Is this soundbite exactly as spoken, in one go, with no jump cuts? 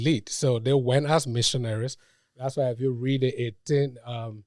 yes; 0 cuts

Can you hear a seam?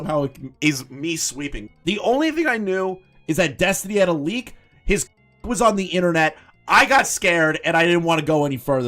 yes; 1 cut; at 1.6 s

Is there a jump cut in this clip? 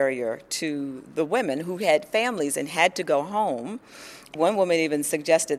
yes; 1 cut; at 4.3 s

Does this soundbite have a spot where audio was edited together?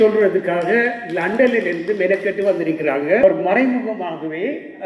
yes; 1 cut; at 3.2 s

